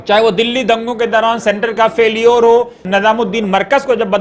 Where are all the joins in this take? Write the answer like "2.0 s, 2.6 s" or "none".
2.8 s